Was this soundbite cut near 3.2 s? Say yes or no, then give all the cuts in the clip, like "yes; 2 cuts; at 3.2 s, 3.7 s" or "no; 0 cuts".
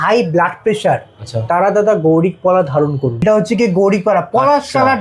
yes; 1 cut; at 3.2 s